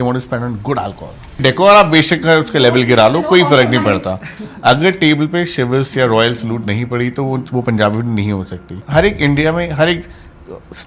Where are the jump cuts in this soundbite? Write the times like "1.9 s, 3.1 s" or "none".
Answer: 1.4 s, 8.8 s